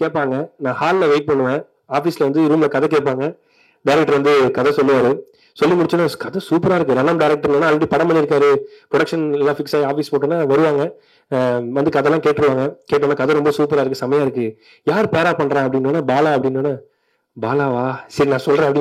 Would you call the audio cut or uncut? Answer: uncut